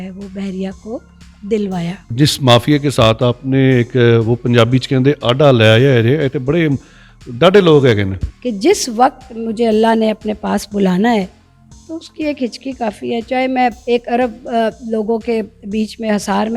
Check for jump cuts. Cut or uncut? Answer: cut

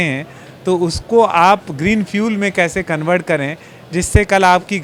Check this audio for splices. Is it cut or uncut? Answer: uncut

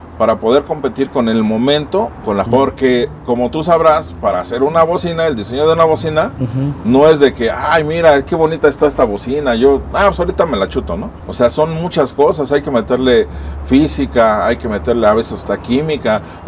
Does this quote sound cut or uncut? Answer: cut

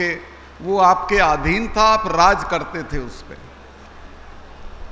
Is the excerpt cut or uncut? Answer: uncut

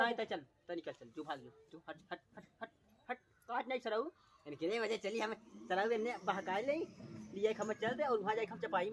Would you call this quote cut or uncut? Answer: uncut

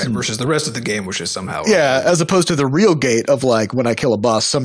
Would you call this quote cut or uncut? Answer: cut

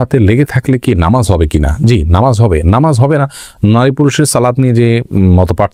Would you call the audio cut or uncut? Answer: uncut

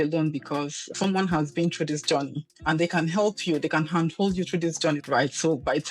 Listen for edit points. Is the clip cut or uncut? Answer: cut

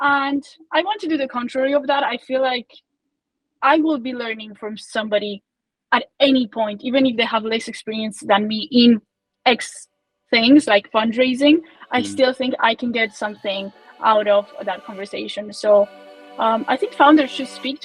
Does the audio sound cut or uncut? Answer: uncut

